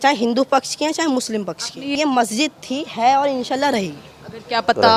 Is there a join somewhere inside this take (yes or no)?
yes